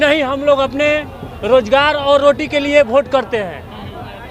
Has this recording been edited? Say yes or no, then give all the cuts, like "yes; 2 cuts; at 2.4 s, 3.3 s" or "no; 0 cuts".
no; 0 cuts